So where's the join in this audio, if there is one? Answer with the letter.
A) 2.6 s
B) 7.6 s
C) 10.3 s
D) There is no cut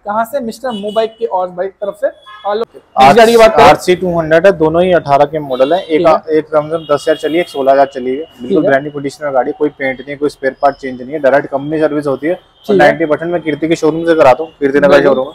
A